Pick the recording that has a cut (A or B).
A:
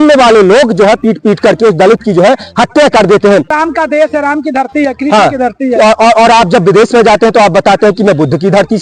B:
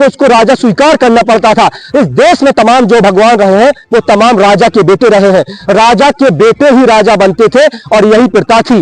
A